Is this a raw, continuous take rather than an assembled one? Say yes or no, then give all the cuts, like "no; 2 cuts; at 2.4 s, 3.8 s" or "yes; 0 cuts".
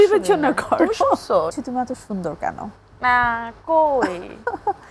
no; 1 cut; at 1.5 s